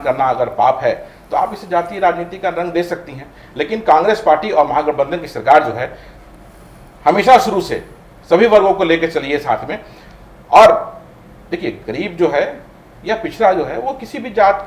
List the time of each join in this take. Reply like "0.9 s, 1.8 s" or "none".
none